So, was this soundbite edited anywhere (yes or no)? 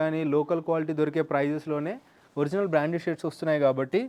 no